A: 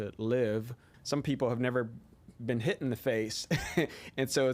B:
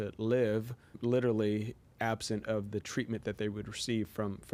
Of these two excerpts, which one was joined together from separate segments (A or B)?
A